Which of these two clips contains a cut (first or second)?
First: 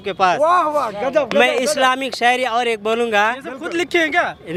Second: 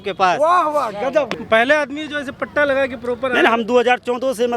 second